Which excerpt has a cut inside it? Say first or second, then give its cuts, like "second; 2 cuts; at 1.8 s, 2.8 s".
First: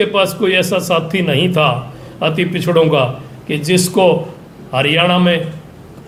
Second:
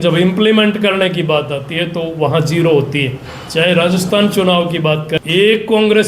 second; 1 cut; at 5.1 s